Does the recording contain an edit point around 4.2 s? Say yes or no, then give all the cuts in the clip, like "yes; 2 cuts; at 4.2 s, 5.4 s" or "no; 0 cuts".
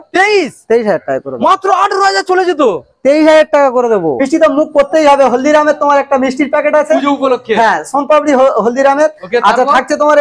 yes; 1 cut; at 4.2 s